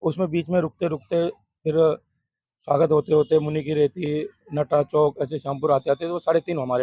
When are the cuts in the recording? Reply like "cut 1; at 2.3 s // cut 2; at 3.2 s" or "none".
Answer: none

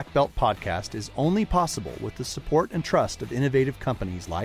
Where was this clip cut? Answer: none

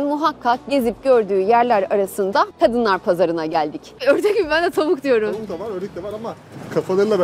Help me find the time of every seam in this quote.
cut 1; at 2.5 s // cut 2; at 4.0 s

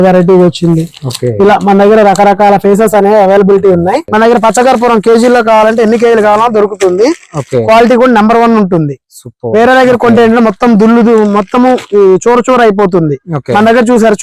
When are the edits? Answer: cut 1; at 4.1 s

